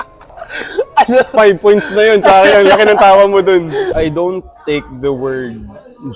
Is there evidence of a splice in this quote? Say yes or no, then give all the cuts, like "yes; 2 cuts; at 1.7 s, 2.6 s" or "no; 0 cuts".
yes; 1 cut; at 3.9 s